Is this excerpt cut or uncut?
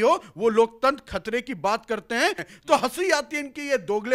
cut